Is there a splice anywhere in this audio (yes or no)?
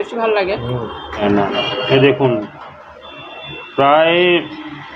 yes